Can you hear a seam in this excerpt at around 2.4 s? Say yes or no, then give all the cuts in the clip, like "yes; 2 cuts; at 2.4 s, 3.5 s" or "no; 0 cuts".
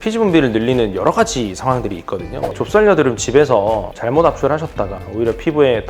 yes; 1 cut; at 2.4 s